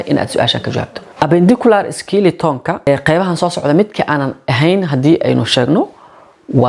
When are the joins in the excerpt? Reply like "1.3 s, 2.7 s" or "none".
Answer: 1.0 s, 2.8 s